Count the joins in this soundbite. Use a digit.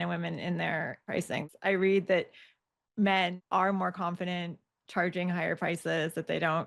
2